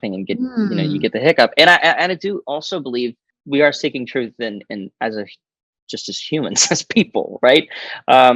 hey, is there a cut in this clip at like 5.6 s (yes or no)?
no